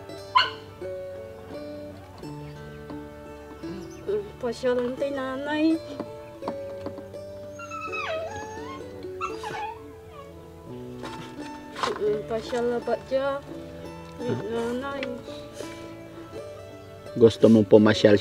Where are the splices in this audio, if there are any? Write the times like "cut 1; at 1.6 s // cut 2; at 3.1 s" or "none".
cut 1; at 0.9 s // cut 2; at 4.0 s